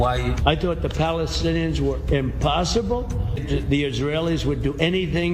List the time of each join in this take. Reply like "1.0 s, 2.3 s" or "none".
3.4 s